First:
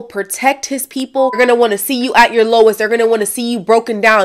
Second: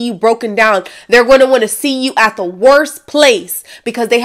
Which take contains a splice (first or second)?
first